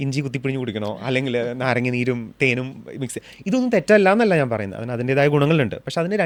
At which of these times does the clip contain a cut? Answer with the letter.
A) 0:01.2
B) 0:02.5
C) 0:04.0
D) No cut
D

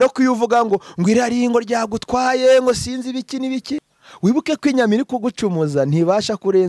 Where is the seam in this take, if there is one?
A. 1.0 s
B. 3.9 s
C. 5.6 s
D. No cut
B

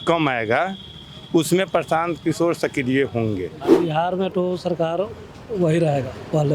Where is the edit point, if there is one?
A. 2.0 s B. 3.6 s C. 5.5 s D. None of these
B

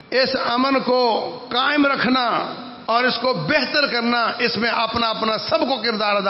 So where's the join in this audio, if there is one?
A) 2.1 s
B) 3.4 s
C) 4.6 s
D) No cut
D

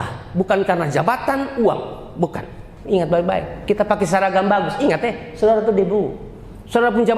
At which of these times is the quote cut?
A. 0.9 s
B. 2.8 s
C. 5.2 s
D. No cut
B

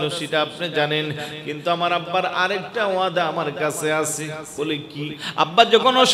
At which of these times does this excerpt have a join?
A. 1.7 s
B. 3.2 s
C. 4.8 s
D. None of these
C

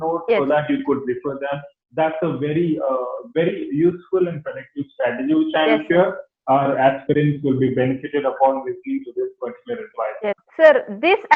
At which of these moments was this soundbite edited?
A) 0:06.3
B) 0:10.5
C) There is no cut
B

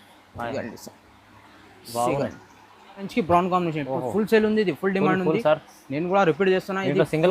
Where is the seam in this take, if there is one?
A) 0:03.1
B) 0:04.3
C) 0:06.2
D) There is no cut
A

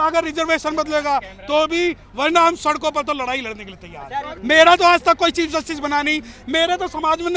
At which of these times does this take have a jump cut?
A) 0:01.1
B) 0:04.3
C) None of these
B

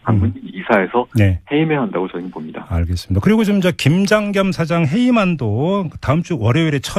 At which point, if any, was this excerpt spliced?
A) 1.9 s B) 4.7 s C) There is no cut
B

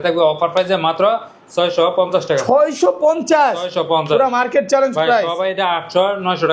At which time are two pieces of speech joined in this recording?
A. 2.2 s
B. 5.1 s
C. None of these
C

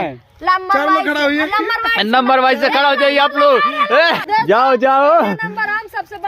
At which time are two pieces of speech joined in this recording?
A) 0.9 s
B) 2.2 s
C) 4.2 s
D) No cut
C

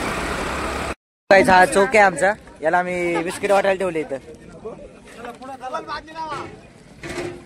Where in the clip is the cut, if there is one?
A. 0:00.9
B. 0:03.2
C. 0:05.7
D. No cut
A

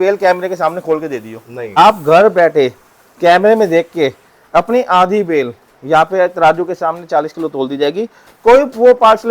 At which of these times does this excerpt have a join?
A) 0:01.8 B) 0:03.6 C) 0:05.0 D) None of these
A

